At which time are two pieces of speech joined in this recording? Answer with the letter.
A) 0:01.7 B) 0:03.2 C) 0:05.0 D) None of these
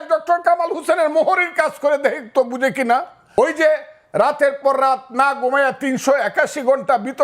B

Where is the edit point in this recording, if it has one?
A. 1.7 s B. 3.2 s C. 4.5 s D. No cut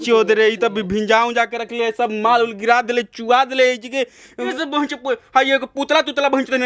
C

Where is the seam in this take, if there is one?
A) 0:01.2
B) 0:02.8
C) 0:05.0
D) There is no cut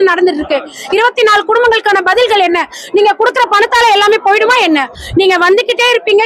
C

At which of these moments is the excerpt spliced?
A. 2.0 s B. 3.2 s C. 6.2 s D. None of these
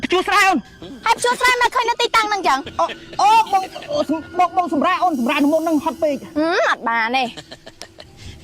C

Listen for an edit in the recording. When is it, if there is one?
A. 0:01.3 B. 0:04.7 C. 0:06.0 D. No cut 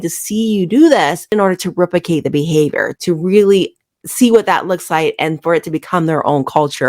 A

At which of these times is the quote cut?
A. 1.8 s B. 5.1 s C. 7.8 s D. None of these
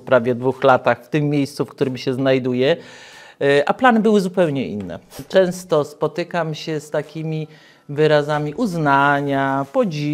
B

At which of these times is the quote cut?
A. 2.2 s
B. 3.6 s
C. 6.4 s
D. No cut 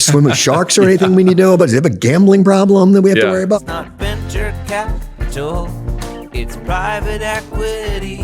B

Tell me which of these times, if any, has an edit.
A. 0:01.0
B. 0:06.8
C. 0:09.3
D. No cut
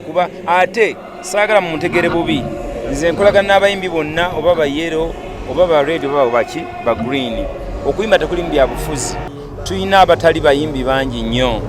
C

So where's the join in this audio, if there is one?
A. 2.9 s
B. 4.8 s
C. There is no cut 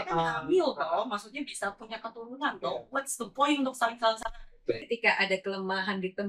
B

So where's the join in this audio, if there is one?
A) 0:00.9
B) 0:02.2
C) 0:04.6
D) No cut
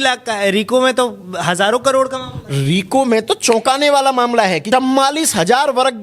C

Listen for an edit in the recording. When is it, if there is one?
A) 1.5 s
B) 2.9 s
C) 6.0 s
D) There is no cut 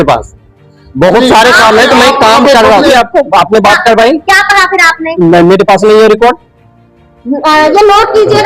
B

